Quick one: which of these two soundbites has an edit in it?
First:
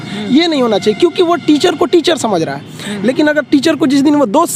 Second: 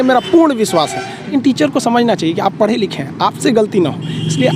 second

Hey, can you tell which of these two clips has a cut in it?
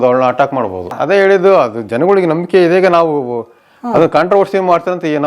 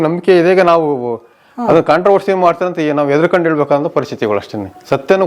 first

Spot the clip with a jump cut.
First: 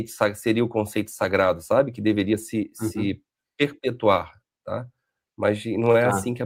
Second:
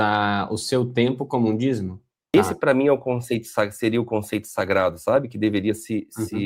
second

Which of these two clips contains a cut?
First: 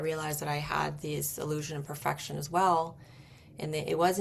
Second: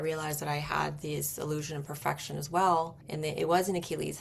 second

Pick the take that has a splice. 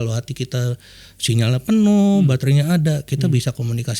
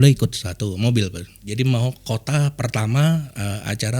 second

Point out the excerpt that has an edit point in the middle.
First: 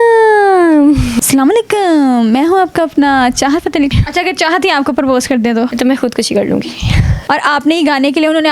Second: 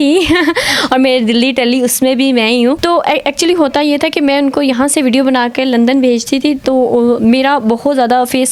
first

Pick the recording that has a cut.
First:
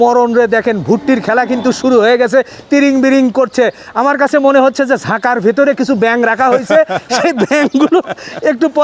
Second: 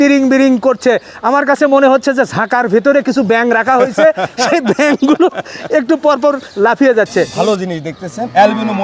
second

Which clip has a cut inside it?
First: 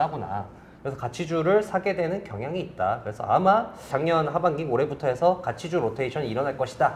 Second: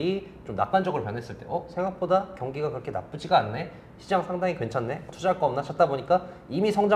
second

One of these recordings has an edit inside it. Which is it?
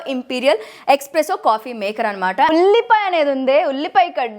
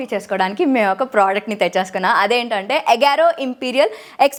first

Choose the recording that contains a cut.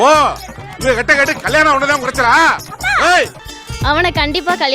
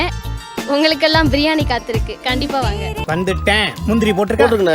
first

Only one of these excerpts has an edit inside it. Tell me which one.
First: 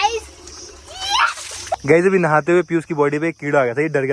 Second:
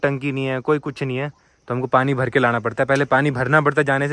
first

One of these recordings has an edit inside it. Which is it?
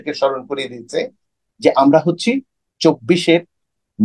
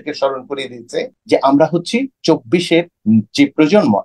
second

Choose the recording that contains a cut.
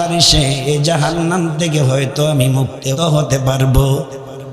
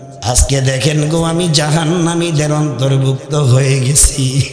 first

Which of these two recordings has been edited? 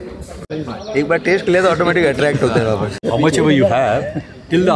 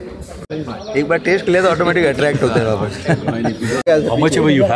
first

